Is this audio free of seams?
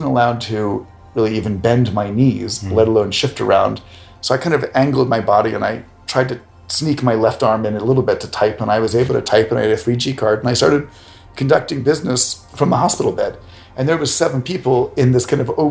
no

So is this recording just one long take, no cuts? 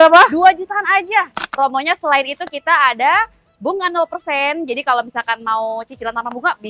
no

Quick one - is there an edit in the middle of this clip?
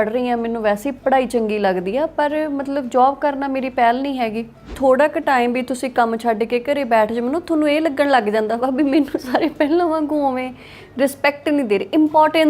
yes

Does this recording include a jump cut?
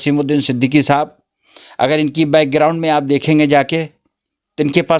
no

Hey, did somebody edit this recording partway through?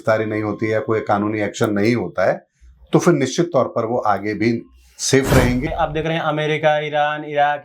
yes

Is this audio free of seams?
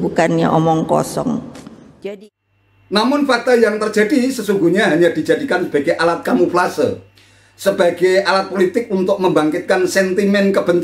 no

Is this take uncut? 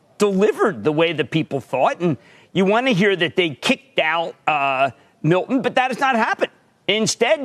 yes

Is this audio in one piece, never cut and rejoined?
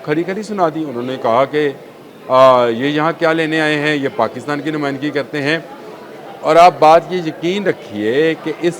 yes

